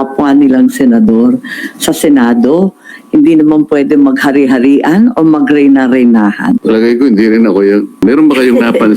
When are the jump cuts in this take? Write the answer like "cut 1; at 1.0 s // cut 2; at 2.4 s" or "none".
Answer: cut 1; at 6.6 s // cut 2; at 8.0 s